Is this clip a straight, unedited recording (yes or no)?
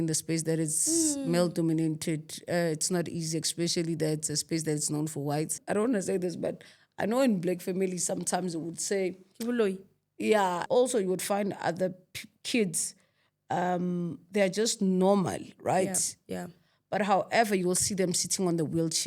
no